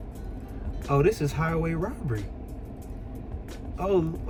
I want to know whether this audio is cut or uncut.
uncut